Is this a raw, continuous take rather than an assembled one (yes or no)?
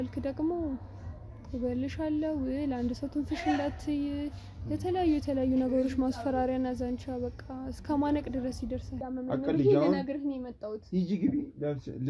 no